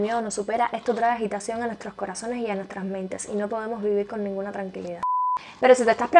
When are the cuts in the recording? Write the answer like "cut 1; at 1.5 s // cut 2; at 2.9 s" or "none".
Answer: cut 1; at 5.0 s